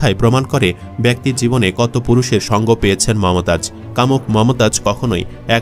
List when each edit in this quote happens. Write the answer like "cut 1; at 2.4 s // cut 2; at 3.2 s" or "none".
cut 1; at 3.8 s